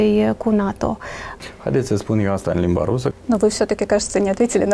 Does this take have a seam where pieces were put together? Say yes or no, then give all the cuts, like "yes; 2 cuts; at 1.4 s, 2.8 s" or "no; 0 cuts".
yes; 2 cuts; at 1.2 s, 3.1 s